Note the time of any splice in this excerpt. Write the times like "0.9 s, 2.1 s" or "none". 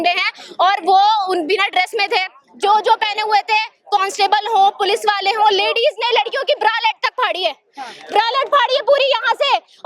none